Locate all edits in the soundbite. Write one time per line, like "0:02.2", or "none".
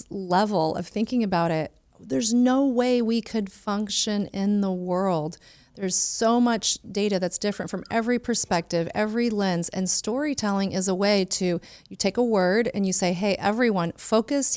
none

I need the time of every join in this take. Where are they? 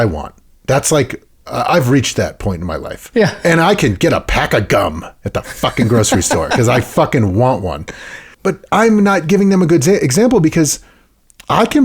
0:03.4
0:08.3

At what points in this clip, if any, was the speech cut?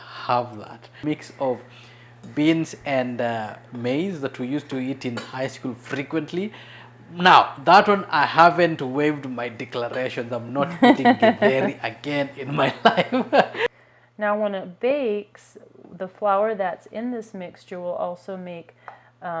0:01.0
0:13.7

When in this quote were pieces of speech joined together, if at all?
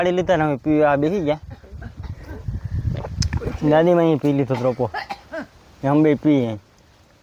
none

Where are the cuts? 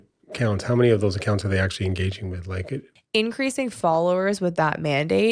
0:02.9

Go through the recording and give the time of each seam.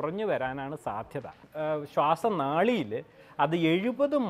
0:01.5

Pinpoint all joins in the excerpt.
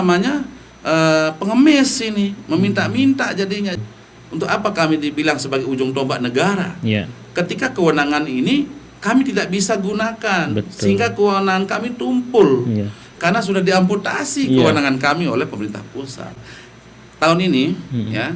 0:03.8
0:16.3

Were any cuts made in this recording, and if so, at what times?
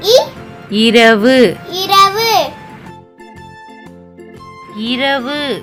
none

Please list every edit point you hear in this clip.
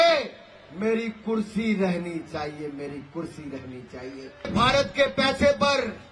0:04.5

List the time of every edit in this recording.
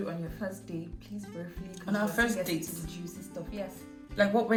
none

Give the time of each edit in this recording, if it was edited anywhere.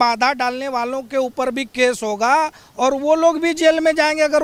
none

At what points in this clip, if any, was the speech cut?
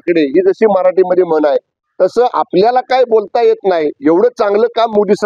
none

